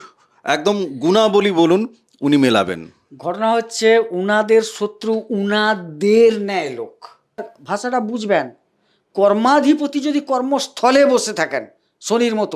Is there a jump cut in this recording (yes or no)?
yes